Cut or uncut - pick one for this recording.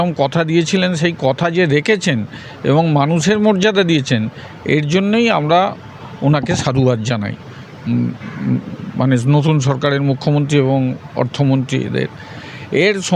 uncut